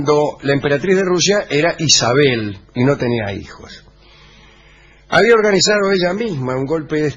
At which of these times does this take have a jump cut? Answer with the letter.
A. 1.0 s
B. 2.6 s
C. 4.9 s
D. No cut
B